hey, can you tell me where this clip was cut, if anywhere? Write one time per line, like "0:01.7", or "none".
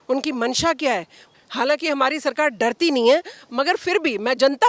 0:01.2